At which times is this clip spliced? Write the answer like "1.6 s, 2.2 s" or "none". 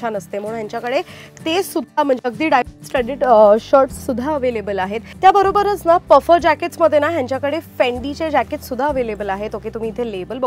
5.0 s